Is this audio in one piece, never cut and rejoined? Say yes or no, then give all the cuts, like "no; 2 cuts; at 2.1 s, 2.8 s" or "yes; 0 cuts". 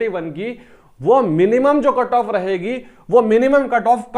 yes; 0 cuts